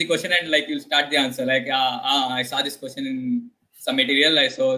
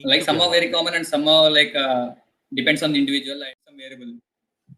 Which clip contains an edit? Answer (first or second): second